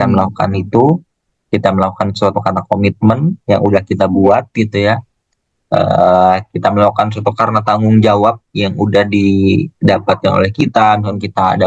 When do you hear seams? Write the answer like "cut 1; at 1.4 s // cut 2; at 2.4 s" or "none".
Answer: none